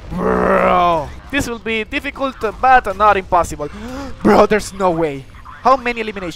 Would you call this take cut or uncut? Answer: cut